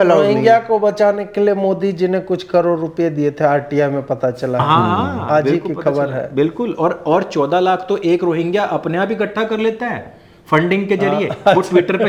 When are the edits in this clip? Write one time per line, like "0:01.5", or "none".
none